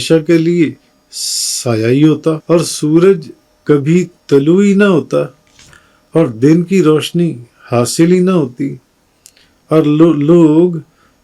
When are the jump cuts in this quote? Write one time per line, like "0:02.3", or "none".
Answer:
0:02.4